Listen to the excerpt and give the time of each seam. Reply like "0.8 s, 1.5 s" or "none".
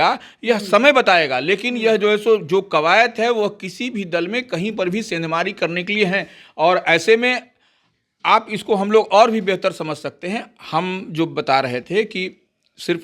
none